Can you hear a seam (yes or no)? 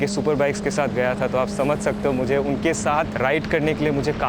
no